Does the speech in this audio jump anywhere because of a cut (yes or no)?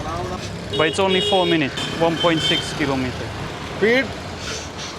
yes